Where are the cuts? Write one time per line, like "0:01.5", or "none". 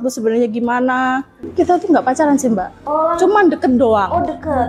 0:01.4